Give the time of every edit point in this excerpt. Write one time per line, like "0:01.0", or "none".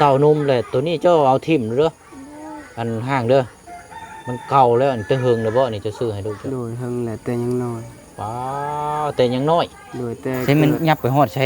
0:10.4